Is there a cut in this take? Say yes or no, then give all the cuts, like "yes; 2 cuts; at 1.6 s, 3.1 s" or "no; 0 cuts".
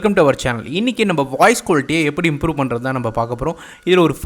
yes; 1 cut; at 2.0 s